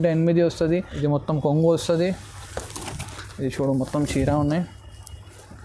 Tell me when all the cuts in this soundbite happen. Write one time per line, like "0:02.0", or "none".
0:00.9